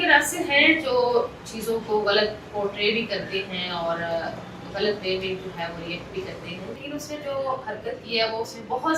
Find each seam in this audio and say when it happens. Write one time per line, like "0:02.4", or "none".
0:06.8